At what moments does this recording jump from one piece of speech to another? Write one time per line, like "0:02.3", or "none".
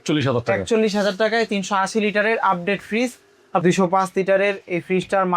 0:03.6